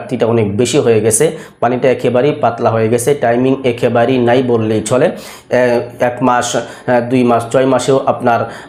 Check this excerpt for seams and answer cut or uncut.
uncut